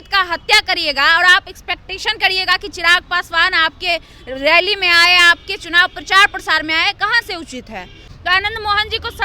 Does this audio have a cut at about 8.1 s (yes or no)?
yes